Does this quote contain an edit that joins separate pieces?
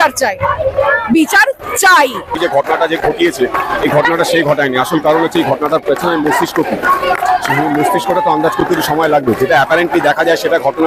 yes; 1 cut; at 2.4 s

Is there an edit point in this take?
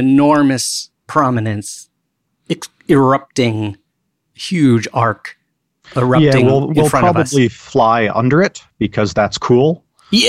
no; 0 cuts

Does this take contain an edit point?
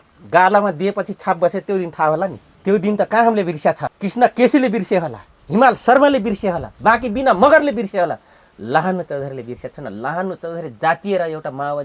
yes; 2 cuts; at 2.5 s, 3.9 s

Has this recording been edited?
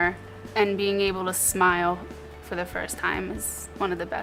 no; 0 cuts

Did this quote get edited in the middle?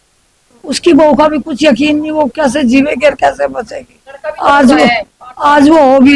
no; 0 cuts

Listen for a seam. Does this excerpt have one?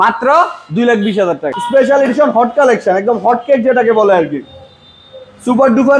yes; 1 cut; at 1.7 s

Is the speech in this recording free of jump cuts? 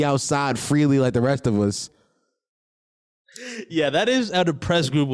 yes; 0 cuts

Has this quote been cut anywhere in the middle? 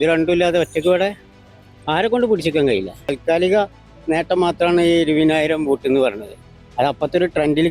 yes; 1 cut; at 3.2 s

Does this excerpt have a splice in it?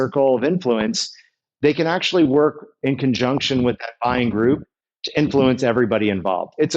no; 0 cuts

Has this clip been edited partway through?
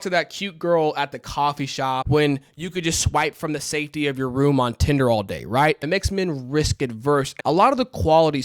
yes; 3 cuts; at 2.0 s, 5.8 s, 7.3 s

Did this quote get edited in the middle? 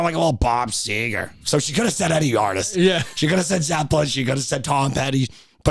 no; 0 cuts

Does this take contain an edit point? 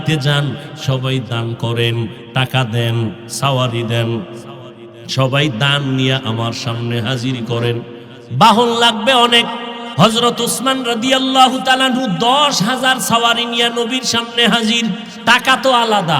yes; 2 cuts; at 9.8 s, 15.1 s

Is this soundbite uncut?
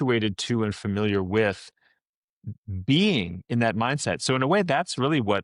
yes; 0 cuts

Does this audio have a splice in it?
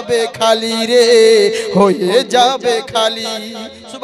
no; 0 cuts

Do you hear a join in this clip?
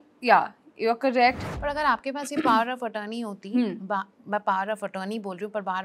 yes; 1 cut; at 1.4 s

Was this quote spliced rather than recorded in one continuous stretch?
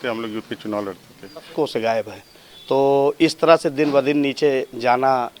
yes; 1 cut; at 1.5 s

